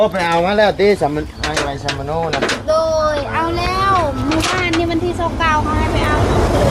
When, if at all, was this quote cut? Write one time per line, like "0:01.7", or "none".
none